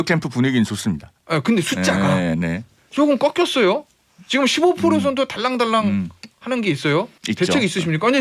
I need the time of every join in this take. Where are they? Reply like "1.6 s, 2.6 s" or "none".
7.2 s